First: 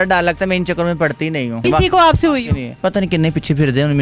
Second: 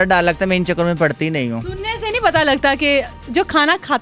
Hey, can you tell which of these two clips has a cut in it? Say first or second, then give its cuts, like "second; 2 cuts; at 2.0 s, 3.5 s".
first; 2 cuts; at 1.6 s, 2.6 s